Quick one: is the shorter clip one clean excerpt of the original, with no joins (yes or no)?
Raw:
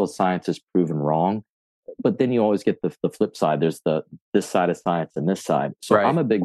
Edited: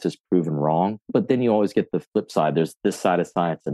no